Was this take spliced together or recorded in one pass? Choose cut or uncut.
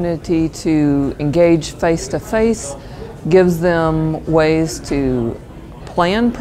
uncut